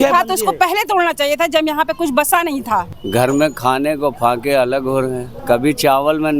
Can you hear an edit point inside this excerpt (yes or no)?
yes